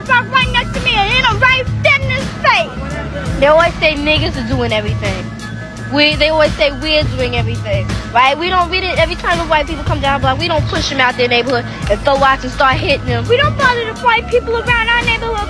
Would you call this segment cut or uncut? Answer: uncut